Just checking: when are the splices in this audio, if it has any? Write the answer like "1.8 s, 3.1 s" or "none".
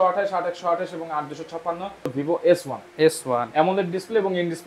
2.1 s